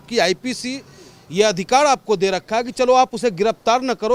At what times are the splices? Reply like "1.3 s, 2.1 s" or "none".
none

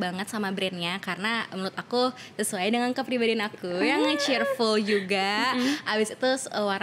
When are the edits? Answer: none

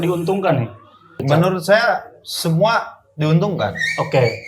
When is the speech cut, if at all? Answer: 1.2 s

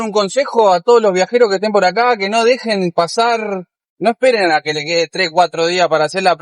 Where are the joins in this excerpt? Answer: none

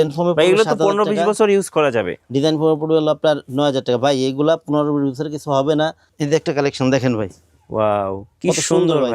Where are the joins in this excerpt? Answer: 6.1 s

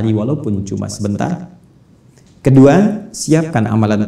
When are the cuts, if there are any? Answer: none

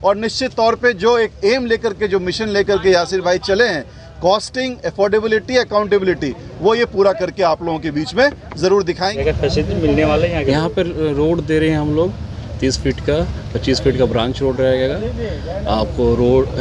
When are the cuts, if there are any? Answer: 9.2 s

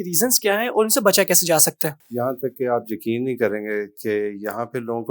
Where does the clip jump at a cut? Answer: 2.0 s

